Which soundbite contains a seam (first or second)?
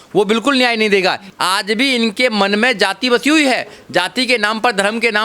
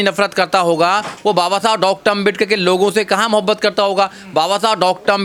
first